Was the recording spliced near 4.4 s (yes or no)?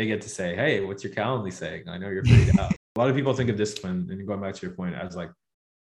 no